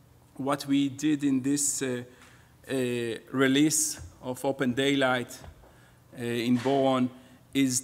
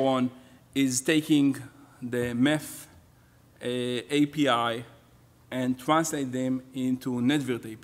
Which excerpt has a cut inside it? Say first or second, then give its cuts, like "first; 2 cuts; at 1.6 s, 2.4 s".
second; 1 cut; at 5.3 s